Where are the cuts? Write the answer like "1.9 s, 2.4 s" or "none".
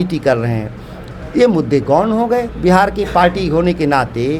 2.5 s